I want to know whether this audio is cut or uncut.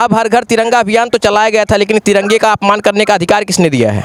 uncut